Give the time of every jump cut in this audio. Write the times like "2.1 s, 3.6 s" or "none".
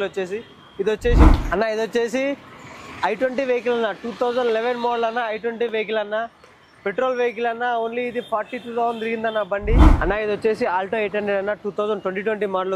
1.3 s, 9.9 s